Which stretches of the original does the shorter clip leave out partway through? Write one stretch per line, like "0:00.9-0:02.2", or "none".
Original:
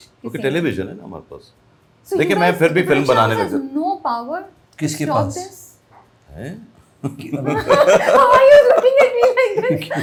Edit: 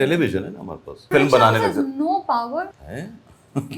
0:01.5-0:02.9
0:04.6-0:06.3